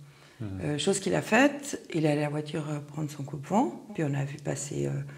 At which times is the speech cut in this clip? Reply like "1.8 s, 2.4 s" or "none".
3.9 s